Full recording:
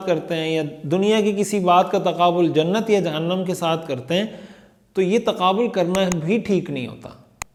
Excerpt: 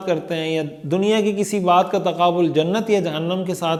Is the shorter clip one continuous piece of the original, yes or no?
yes